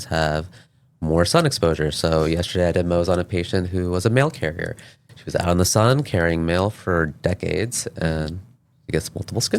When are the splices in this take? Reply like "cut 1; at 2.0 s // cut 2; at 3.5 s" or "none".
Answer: none